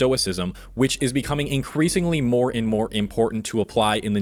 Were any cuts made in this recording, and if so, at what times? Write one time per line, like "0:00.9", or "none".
none